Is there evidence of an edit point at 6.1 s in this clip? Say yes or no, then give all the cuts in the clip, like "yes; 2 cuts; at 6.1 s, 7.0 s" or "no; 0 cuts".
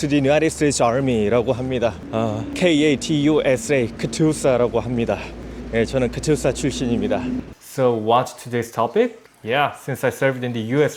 no; 3 cuts; at 2.4 s, 7.6 s, 9.3 s